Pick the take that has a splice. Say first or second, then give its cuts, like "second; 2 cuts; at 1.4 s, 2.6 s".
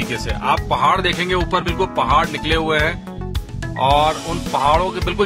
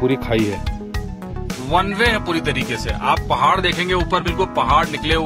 second; 1 cut; at 1.2 s